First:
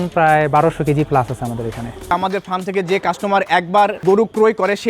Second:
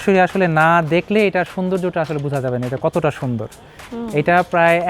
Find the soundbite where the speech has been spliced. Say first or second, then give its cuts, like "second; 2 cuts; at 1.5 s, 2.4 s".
first; 2 cuts; at 2.0 s, 4.0 s